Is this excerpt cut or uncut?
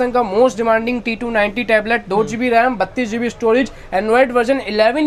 uncut